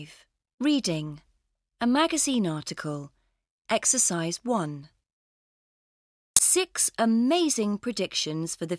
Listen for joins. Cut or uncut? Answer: uncut